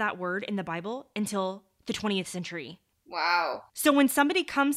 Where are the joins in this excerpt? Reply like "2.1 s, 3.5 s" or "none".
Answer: 3.8 s